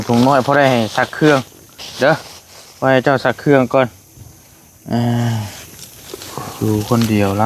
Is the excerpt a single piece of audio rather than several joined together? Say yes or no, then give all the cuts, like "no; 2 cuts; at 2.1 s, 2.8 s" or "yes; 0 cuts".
yes; 0 cuts